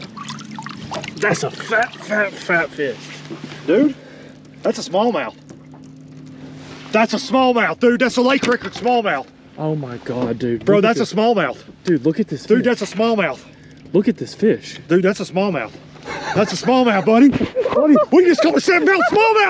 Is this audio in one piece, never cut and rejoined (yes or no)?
yes